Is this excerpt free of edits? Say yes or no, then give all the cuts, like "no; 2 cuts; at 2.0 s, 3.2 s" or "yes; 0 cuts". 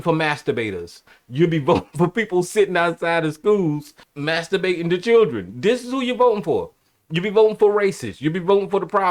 yes; 0 cuts